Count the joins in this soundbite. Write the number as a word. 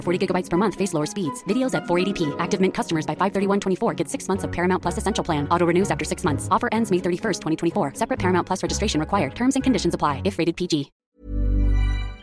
one